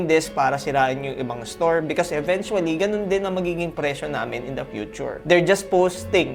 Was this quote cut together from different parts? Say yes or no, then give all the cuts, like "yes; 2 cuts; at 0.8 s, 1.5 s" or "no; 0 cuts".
no; 0 cuts